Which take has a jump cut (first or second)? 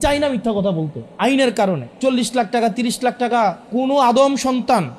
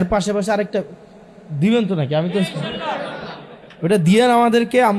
first